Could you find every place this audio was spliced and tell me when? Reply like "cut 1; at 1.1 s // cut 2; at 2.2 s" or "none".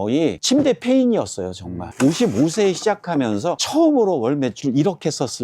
cut 1; at 1.9 s // cut 2; at 3.6 s